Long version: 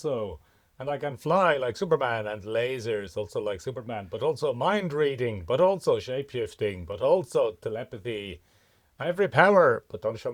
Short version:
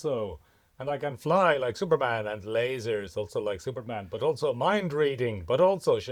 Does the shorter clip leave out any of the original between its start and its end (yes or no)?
no